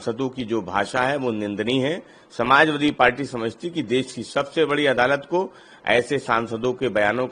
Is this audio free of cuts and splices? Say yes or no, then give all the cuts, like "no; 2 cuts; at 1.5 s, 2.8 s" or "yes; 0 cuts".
yes; 0 cuts